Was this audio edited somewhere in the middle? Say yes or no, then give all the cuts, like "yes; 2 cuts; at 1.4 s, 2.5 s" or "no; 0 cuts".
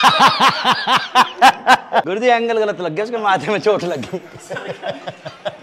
yes; 1 cut; at 2.1 s